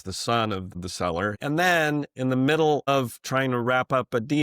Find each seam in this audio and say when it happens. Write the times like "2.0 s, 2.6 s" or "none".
1.1 s